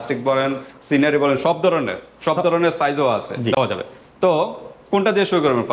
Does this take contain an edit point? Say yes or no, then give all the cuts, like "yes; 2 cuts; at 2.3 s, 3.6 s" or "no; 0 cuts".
no; 0 cuts